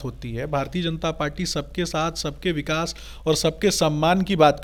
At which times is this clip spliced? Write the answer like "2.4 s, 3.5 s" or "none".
none